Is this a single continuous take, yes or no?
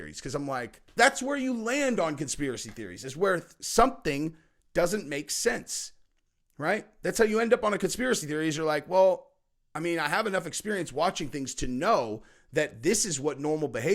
no